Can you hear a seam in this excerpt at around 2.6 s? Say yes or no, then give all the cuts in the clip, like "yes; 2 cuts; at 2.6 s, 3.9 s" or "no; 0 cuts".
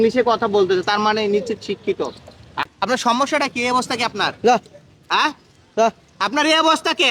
yes; 1 cut; at 2.6 s